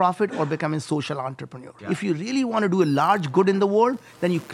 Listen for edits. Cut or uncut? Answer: cut